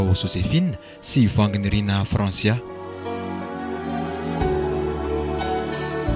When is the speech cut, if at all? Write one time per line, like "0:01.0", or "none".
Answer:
0:02.7